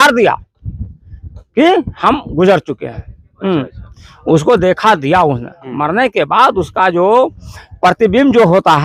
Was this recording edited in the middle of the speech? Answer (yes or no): no